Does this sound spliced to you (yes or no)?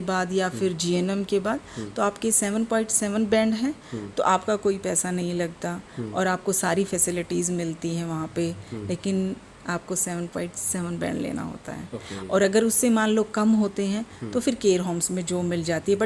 no